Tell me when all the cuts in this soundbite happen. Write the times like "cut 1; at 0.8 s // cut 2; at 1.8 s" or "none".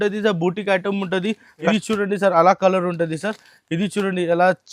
cut 1; at 1.7 s